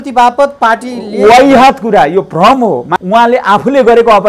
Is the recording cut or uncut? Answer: cut